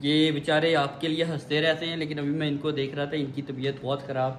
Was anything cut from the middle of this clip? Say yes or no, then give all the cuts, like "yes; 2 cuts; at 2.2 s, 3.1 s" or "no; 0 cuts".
no; 0 cuts